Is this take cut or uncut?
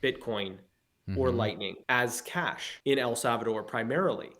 cut